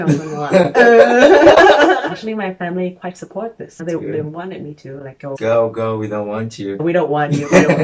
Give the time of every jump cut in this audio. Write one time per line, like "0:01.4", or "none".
0:02.0
0:03.7
0:05.4